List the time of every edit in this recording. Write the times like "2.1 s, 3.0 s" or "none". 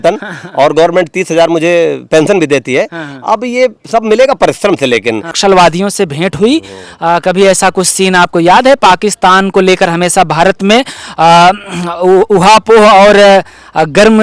5.3 s